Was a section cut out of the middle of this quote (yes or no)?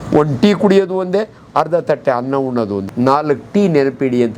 yes